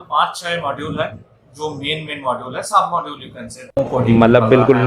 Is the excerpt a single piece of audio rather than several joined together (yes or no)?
no